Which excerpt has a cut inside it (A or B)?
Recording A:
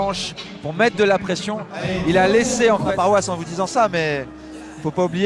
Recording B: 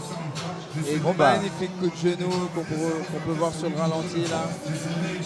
A